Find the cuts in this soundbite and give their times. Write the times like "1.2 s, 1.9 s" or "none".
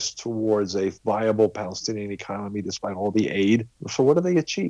3.8 s